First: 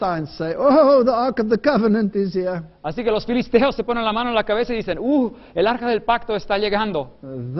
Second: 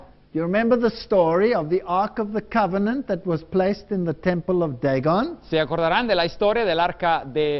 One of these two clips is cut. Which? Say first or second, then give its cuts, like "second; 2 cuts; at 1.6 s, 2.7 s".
first; 1 cut; at 2.1 s